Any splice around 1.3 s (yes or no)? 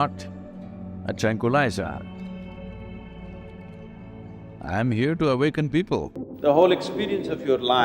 no